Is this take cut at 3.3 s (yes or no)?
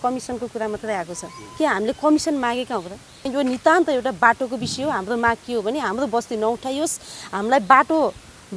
yes